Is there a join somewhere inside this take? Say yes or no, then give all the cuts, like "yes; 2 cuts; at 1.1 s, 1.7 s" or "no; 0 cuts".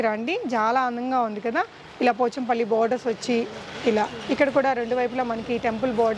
no; 0 cuts